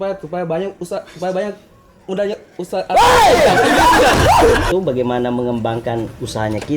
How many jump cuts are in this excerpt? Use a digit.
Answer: 1